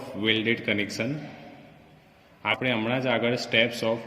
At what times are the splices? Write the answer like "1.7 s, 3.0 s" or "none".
2.5 s